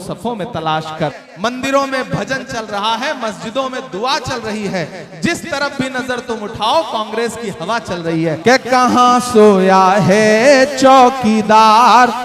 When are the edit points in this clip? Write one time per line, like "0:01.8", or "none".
0:01.2
0:08.4